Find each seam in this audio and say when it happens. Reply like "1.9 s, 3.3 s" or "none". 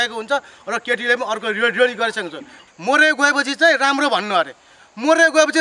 2.6 s